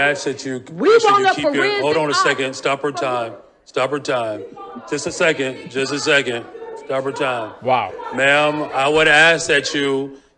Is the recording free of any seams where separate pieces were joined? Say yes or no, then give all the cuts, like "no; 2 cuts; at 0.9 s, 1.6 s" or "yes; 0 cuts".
yes; 0 cuts